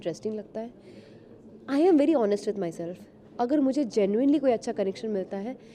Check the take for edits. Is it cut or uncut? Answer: uncut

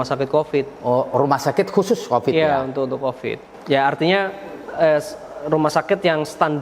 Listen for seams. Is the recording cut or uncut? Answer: cut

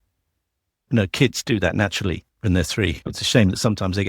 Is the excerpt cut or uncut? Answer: cut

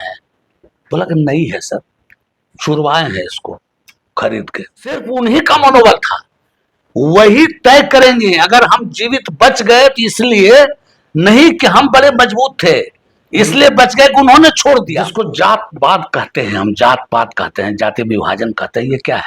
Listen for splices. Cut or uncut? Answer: cut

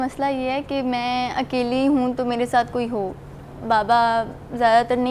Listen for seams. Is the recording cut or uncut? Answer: uncut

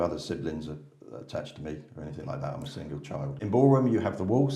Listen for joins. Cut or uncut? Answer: cut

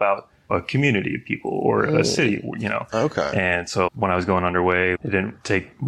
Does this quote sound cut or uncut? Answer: cut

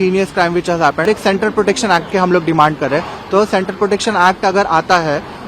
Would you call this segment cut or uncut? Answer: cut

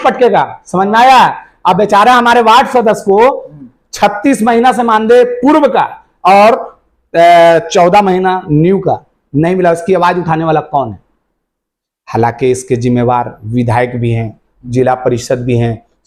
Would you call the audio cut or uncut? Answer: uncut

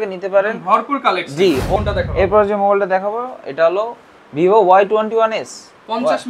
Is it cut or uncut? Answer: cut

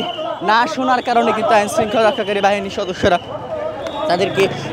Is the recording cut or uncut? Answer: uncut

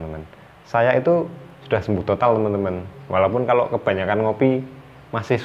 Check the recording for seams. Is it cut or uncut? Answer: uncut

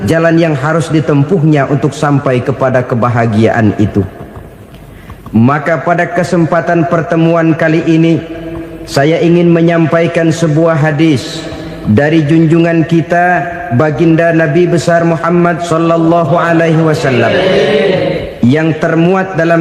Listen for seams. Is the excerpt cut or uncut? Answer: uncut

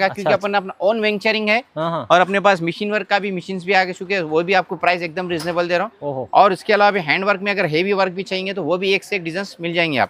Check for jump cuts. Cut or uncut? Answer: uncut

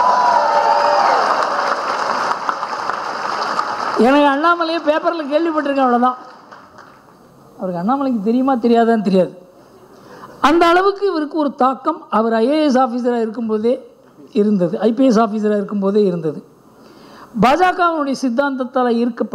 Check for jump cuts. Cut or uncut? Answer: uncut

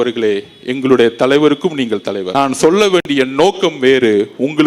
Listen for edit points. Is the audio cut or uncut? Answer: cut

